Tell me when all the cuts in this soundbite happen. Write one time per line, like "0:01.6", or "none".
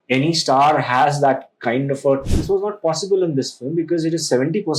0:02.3